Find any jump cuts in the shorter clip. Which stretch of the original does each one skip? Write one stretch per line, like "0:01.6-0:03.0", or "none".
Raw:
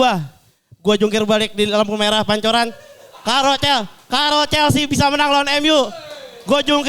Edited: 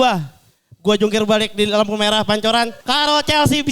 0:02.8-0:04.0